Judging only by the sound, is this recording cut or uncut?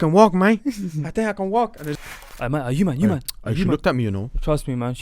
cut